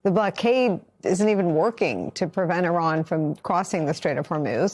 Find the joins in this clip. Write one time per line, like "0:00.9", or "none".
0:00.9
0:02.2